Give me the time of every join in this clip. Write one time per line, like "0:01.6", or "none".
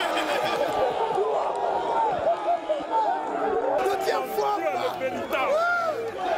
0:03.8